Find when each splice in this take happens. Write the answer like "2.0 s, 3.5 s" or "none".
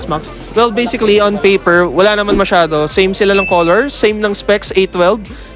none